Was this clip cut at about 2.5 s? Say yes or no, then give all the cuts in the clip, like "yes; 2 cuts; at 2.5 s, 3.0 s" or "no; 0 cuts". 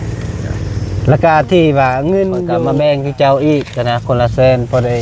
yes; 1 cut; at 2.5 s